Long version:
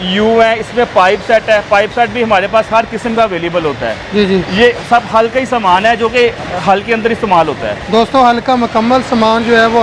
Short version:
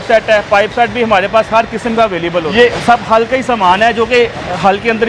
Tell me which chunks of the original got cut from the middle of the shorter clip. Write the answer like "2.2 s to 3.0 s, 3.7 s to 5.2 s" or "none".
3.7 s to 4.5 s